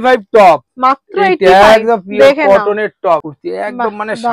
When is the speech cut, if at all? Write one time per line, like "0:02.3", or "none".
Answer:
0:03.3

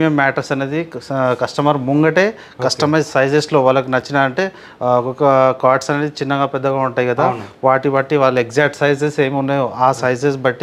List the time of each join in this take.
none

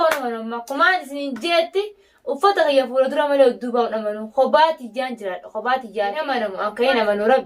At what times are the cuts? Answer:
0:06.3

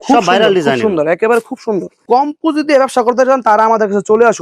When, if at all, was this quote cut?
0:02.0

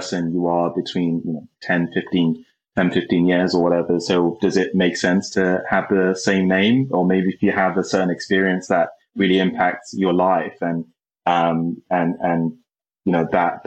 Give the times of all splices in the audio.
none

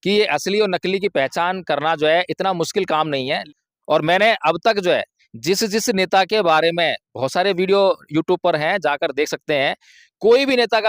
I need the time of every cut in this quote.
0:03.4

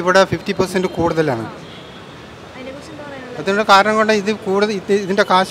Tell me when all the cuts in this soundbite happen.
none

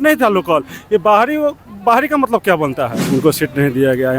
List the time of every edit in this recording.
0:03.0

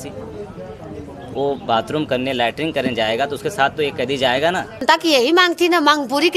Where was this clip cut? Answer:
0:04.8

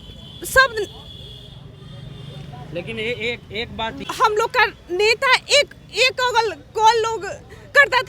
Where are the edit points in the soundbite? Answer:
0:04.0

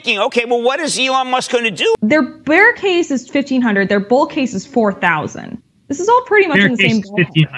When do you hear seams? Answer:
0:02.0

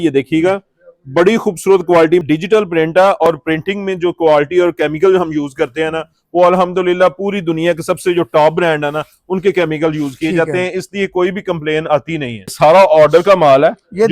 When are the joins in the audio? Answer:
0:02.2
0:12.5

